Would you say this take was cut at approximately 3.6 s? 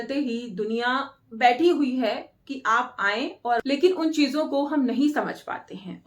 yes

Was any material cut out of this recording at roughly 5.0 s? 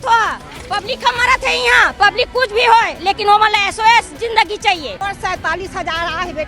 yes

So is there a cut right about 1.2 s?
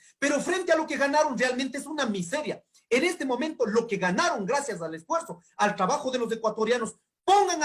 no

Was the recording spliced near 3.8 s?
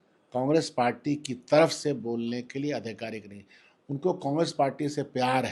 no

